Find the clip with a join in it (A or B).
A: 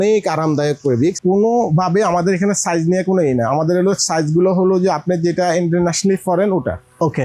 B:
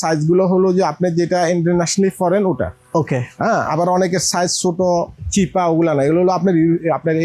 A